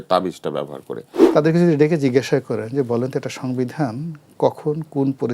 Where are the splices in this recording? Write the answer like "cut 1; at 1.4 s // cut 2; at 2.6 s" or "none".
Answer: cut 1; at 1.1 s